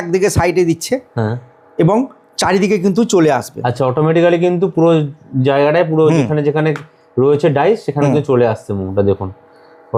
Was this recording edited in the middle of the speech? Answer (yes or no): no